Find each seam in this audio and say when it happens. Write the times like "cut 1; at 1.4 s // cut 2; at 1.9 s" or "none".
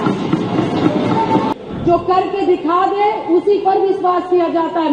cut 1; at 1.5 s